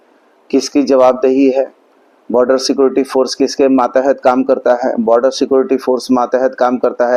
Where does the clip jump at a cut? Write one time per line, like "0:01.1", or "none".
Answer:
none